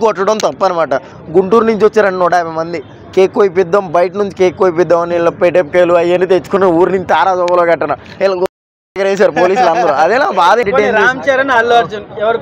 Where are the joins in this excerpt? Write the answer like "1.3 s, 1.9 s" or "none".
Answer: 1.2 s, 10.6 s